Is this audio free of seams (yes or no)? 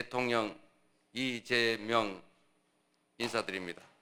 yes